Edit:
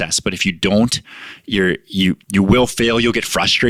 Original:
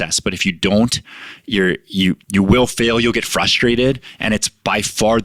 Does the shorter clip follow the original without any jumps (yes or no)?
yes